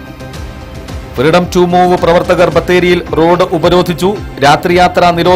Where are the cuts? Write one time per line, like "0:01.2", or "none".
none